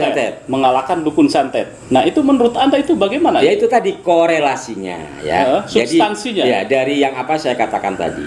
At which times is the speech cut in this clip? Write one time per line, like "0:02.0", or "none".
none